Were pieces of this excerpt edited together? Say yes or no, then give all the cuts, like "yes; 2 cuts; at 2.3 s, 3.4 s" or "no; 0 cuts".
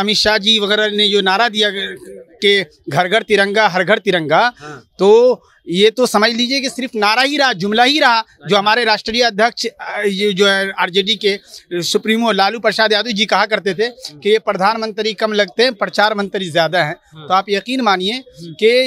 no; 0 cuts